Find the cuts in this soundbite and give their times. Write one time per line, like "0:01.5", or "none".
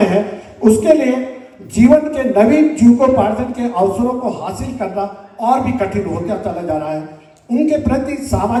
none